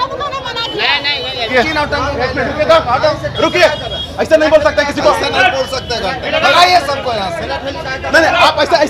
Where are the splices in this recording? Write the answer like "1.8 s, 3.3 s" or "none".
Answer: 1.5 s